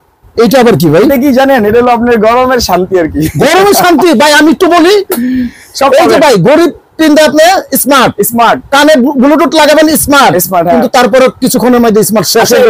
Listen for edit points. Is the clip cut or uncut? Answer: uncut